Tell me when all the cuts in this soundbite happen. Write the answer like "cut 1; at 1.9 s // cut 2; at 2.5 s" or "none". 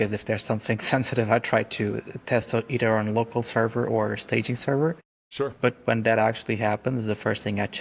none